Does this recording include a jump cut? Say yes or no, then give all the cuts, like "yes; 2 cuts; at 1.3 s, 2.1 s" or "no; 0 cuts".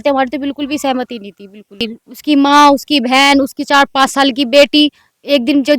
yes; 1 cut; at 1.9 s